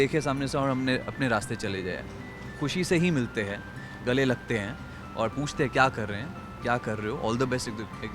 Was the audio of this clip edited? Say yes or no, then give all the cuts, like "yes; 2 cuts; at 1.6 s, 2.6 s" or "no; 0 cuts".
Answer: no; 0 cuts